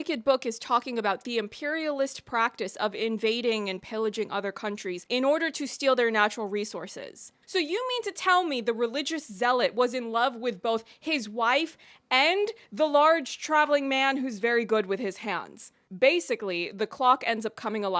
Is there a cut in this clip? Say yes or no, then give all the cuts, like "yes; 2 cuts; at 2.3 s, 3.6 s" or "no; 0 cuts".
yes; 2 cuts; at 7.3 s, 15.8 s